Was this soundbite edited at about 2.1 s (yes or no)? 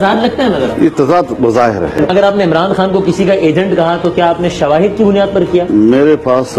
yes